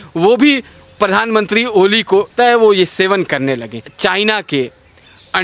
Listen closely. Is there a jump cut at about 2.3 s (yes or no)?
yes